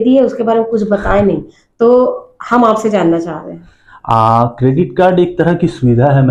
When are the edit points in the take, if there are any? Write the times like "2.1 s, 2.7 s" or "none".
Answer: none